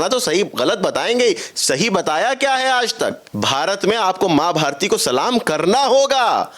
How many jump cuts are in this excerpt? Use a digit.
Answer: 1